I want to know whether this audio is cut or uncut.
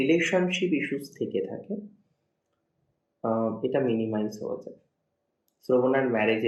uncut